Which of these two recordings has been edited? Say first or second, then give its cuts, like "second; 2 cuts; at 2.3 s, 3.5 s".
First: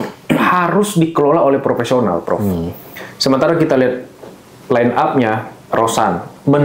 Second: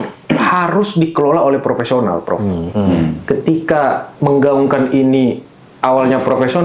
second; 1 cut; at 2.6 s